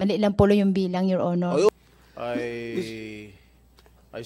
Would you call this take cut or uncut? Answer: cut